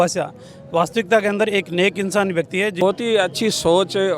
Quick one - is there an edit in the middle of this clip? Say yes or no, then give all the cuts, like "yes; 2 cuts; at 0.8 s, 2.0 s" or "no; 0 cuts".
yes; 1 cut; at 2.8 s